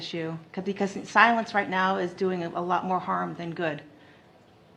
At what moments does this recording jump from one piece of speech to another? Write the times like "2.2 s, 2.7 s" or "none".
none